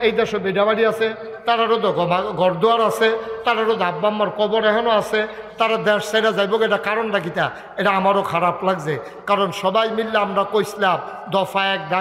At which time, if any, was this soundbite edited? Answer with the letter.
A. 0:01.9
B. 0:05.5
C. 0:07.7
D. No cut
D